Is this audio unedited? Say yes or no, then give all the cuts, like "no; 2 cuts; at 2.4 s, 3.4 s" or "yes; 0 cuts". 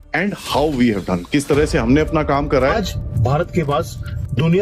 no; 1 cut; at 2.7 s